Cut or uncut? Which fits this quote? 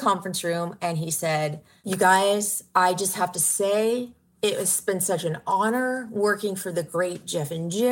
cut